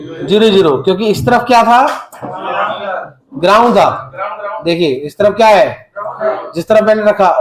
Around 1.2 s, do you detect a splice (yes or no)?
no